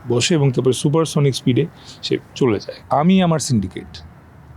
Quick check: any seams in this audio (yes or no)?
yes